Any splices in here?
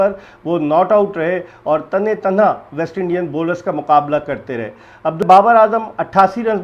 yes; 1 cut; at 5.2 s

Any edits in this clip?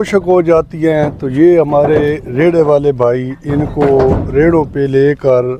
no; 0 cuts

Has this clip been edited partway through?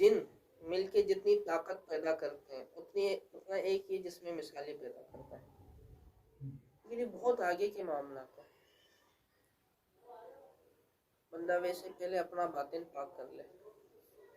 yes; 1 cut; at 6.5 s

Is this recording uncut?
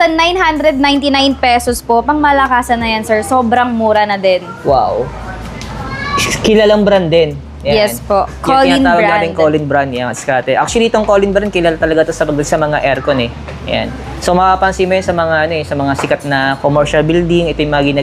yes; 0 cuts

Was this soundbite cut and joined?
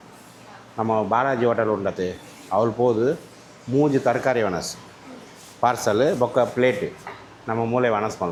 no; 0 cuts

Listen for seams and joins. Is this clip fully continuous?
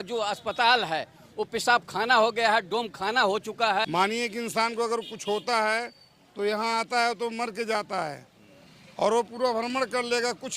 no; 1 cut; at 3.9 s

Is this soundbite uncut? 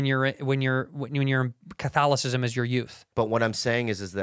no; 1 cut; at 3.0 s

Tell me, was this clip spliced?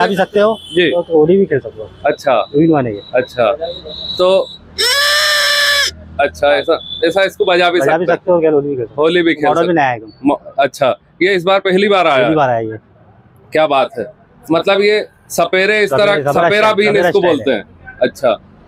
no; 0 cuts

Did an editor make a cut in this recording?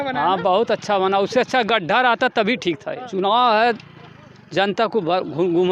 yes; 1 cut; at 2.9 s

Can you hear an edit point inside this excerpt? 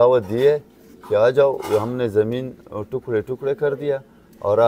no; 0 cuts

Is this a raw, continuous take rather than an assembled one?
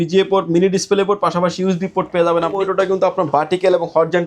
no; 1 cut; at 2.6 s

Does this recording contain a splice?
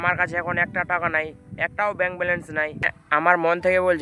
yes; 1 cut; at 2.9 s

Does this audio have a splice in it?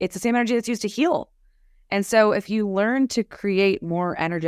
no; 0 cuts

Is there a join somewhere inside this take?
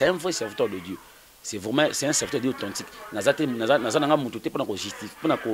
no; 0 cuts

